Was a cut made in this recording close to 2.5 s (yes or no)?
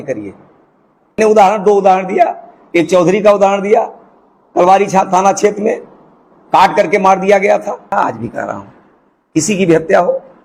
no